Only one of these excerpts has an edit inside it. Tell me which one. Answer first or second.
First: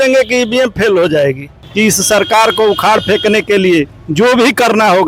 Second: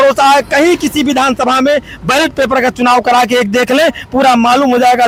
first